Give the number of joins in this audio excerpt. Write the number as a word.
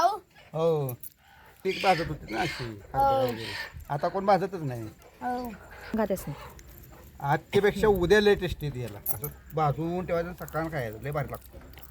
one